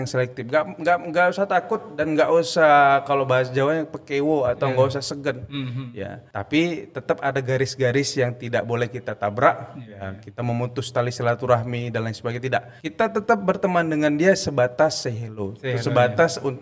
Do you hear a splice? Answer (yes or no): yes